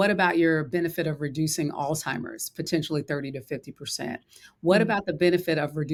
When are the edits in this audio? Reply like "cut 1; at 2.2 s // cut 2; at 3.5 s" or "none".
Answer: none

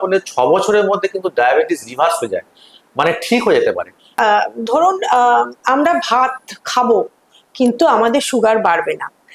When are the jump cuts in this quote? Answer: cut 1; at 4.0 s

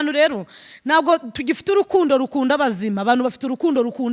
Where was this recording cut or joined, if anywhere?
none

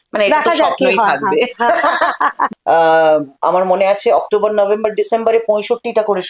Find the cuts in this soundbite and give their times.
cut 1; at 2.5 s

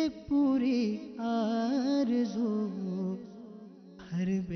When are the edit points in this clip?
none

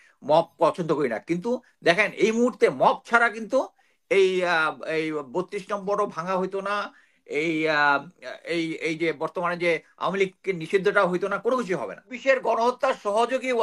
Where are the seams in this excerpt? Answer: cut 1; at 12.1 s

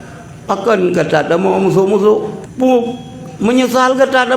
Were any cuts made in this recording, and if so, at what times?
cut 1; at 2.4 s

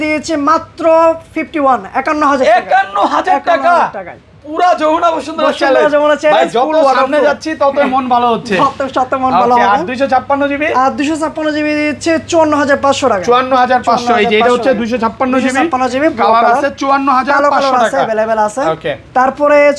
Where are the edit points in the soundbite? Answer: none

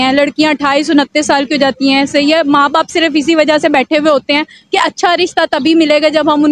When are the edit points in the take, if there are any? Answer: none

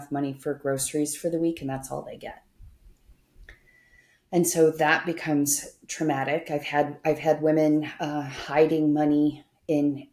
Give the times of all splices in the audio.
none

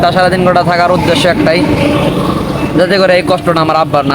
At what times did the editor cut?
none

